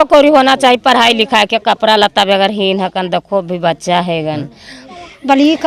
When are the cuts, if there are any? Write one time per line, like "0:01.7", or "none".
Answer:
0:04.7

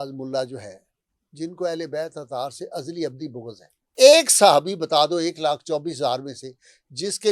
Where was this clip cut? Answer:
0:03.9

